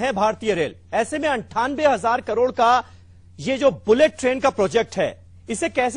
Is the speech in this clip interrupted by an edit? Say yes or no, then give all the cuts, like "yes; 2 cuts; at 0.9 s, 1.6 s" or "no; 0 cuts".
yes; 1 cut; at 2.9 s